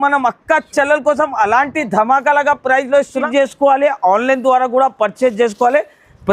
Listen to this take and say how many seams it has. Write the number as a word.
one